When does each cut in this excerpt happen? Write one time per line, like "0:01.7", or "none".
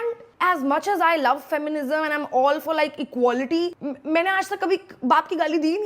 0:03.8